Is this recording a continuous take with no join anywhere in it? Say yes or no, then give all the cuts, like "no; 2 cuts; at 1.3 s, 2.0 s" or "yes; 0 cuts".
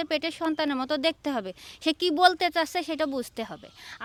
yes; 0 cuts